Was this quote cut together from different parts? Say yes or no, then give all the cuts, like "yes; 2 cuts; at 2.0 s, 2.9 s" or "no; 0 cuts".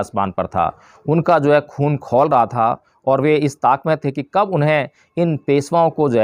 no; 0 cuts